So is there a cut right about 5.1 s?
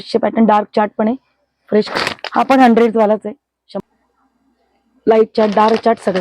no; 2 cuts; at 1.9 s, 3.8 s

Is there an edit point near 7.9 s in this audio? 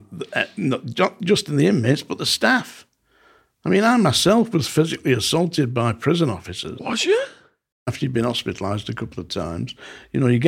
yes; 1 cut; at 7.9 s

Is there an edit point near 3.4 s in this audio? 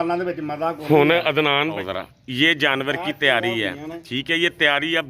no; 1 cut; at 1.8 s

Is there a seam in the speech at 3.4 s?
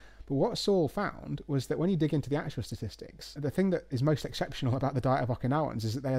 yes; 1 cut; at 3.4 s

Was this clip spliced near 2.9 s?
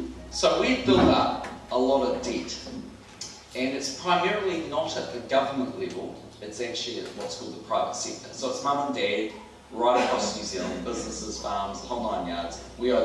yes; 1 cut; at 2.9 s

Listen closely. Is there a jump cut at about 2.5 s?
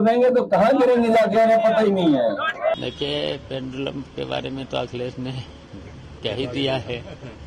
no; 0 cuts

